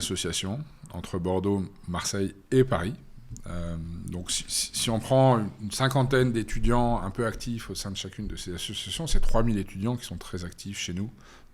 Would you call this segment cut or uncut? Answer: uncut